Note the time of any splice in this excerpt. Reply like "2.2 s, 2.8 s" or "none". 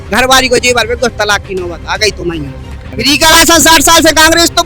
2.9 s